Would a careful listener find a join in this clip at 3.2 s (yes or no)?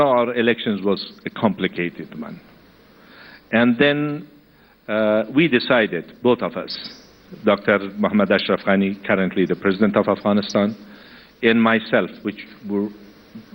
no